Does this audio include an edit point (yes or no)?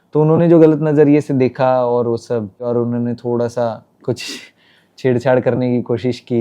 yes